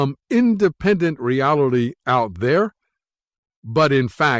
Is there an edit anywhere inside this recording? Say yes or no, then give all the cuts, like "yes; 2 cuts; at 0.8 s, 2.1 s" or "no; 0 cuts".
no; 0 cuts